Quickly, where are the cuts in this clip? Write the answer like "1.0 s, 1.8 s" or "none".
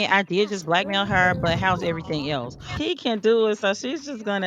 2.7 s